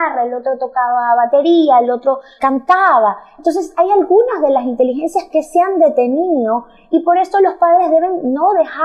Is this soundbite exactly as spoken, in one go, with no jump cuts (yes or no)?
yes